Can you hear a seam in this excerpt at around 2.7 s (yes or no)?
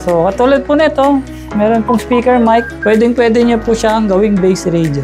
yes